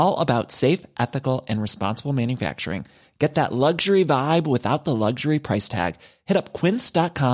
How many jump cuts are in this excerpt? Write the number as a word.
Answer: zero